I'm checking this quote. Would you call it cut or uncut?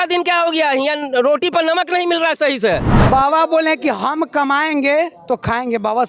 cut